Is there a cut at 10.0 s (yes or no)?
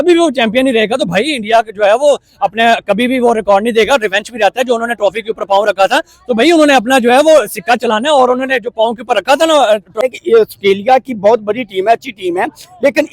yes